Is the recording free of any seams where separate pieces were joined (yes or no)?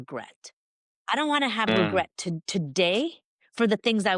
yes